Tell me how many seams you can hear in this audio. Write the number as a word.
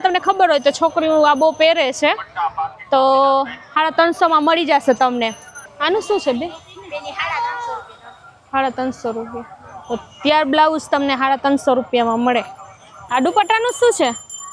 two